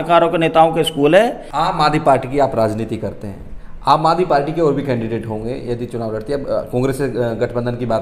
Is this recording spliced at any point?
yes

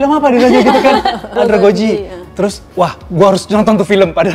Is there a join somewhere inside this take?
yes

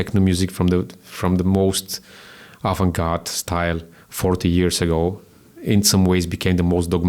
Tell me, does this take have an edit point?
no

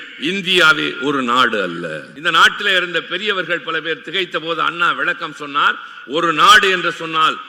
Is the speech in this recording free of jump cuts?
no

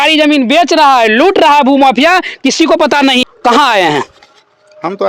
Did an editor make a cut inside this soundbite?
yes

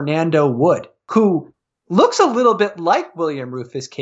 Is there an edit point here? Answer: yes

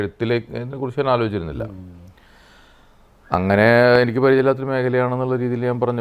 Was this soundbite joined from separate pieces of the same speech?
no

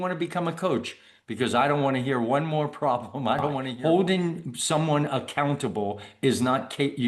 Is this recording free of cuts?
no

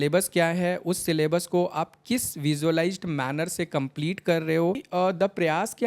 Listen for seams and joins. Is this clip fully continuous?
no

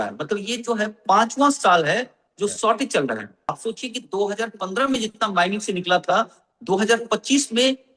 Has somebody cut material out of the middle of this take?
yes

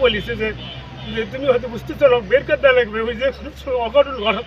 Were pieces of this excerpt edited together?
no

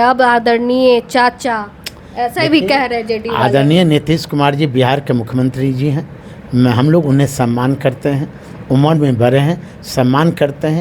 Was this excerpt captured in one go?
yes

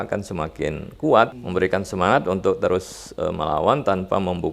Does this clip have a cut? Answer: yes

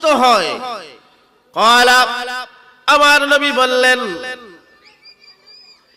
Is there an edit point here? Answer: no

